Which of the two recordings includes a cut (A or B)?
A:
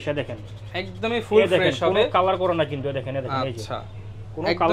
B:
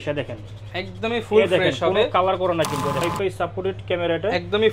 B